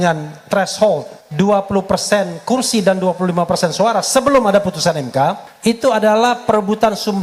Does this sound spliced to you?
yes; 2 cuts; at 1.2 s, 5.5 s

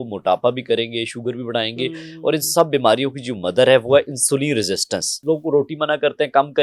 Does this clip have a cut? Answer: yes; 1 cut; at 5.2 s

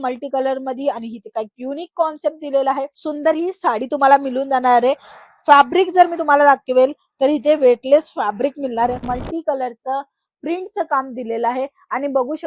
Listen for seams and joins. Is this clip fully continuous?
no; 1 cut; at 9.0 s

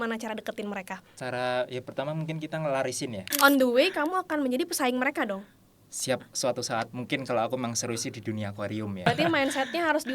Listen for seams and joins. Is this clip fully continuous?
no; 2 cuts; at 3.2 s, 9.1 s

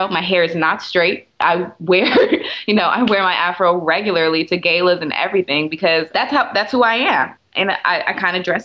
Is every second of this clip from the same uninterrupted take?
no; 1 cut; at 7.4 s

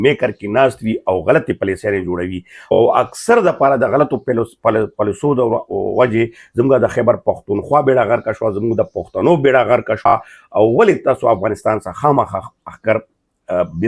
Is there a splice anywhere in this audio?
no; 0 cuts

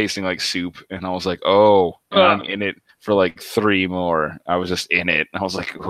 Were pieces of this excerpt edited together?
no; 0 cuts

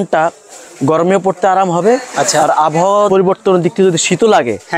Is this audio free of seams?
yes; 0 cuts

